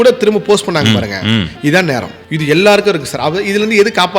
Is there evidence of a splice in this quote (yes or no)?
yes